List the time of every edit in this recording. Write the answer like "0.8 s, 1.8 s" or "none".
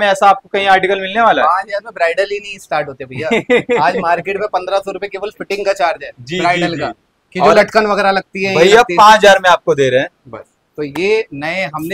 none